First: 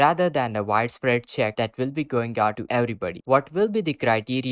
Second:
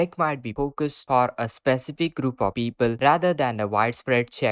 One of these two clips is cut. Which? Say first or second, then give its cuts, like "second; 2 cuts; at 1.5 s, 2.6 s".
first; 1 cut; at 3.2 s